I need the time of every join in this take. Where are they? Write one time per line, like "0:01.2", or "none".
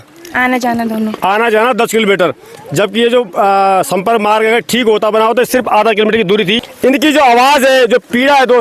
0:06.7